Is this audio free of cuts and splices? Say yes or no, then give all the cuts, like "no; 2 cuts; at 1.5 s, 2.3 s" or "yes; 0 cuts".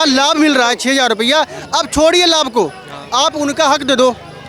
yes; 0 cuts